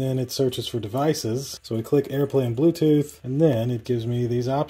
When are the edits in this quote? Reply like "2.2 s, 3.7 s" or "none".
1.5 s